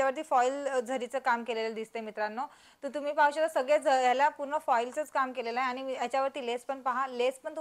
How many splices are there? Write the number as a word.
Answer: zero